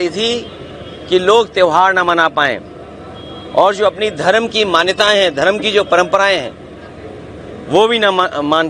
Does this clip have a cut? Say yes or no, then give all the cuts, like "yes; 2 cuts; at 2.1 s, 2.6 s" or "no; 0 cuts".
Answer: no; 0 cuts